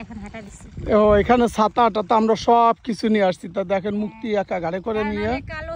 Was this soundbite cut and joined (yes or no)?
no